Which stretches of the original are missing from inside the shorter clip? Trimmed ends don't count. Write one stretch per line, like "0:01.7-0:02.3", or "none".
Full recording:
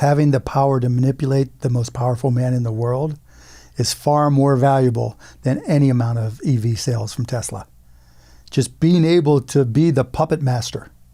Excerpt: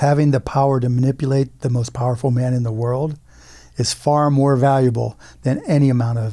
none